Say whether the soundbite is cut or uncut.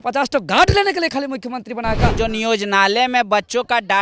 cut